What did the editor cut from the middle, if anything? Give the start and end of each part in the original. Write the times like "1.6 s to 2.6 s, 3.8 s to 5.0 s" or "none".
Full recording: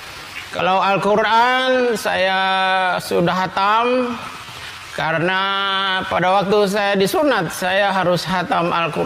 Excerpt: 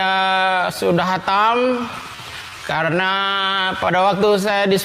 none